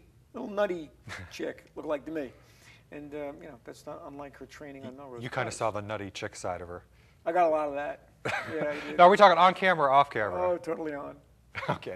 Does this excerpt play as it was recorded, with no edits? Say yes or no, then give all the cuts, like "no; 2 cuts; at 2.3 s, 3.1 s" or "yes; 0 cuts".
yes; 0 cuts